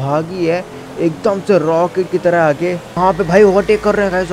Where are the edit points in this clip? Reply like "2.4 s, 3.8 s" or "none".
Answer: 3.0 s